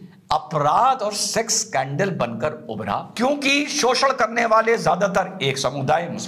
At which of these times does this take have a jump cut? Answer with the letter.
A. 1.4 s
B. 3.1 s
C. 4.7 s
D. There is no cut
B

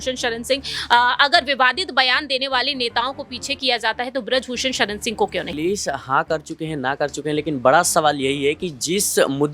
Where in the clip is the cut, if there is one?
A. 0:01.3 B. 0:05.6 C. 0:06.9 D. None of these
B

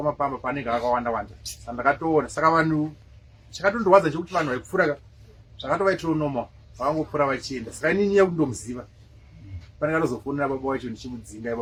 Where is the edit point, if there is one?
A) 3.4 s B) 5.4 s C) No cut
C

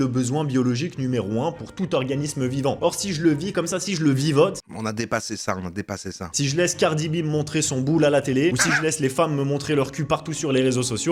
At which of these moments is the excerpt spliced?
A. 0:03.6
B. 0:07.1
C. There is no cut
C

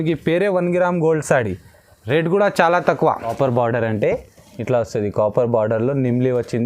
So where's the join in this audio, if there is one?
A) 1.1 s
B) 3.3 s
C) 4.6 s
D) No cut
B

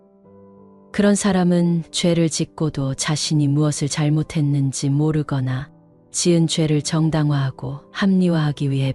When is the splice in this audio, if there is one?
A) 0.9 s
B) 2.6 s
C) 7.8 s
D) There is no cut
D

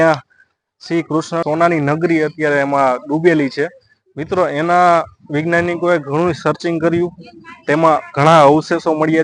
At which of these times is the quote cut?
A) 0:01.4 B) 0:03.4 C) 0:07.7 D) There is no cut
A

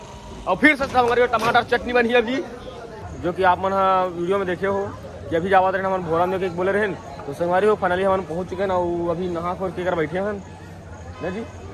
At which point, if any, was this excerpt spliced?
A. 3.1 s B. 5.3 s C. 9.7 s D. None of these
A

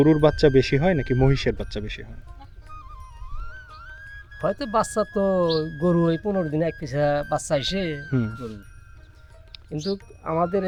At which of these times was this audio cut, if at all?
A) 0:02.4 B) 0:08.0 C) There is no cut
C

